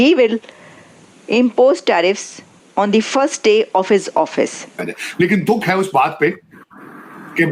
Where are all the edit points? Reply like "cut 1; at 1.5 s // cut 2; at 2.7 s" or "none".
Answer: cut 1; at 4.7 s